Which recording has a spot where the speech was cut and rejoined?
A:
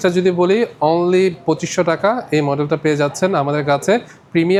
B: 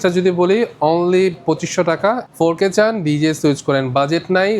B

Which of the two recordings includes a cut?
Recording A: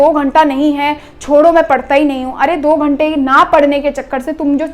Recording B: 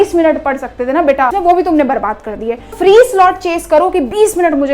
B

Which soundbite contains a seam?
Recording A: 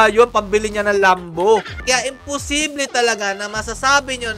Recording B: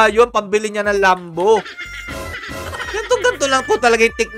A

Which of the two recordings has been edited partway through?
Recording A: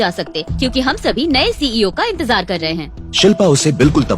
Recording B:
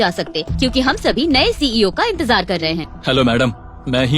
B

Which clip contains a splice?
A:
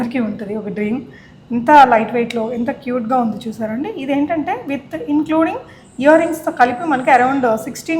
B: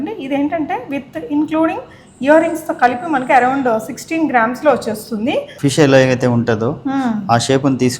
B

